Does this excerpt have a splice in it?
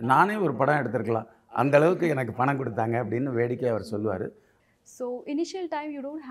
yes; 1 cut; at 4.5 s

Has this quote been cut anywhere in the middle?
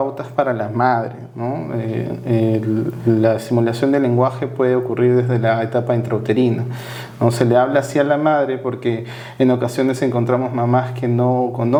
no; 0 cuts

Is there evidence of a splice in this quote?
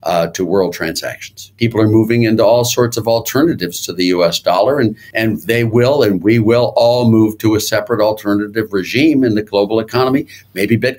yes; 2 cuts; at 1.4 s, 5.0 s

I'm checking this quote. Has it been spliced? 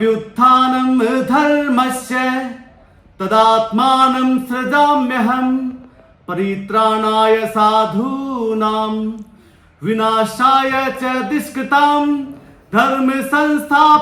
no; 0 cuts

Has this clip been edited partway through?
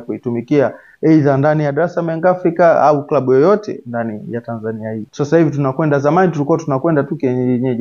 yes; 1 cut; at 5.1 s

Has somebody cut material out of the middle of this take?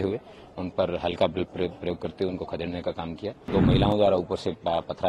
yes; 1 cut; at 3.5 s

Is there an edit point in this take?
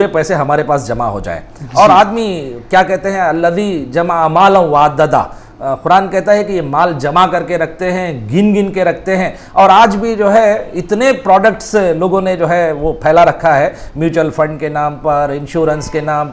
no; 0 cuts

